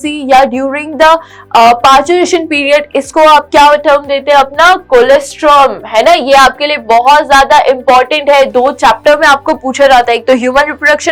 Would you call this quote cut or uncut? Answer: uncut